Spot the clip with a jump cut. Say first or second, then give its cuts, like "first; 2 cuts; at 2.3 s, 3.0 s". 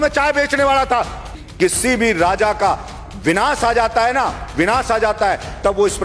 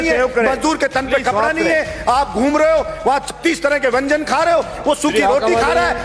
first; 1 cut; at 1.4 s